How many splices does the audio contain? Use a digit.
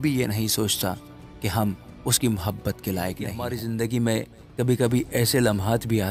1